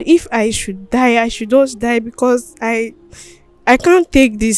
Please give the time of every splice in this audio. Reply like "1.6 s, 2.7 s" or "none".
none